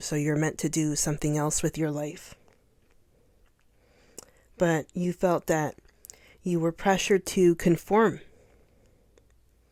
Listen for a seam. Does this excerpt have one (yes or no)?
no